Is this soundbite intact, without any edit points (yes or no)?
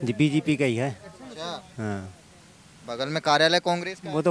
yes